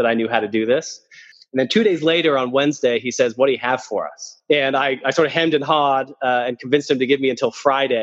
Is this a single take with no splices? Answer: no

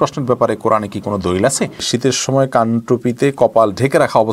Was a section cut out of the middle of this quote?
yes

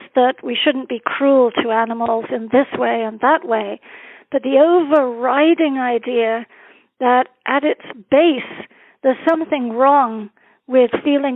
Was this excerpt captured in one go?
yes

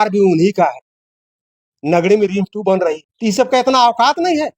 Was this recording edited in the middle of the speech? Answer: yes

